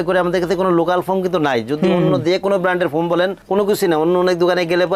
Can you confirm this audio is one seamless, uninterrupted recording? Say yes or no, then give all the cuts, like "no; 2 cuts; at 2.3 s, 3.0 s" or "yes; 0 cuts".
yes; 0 cuts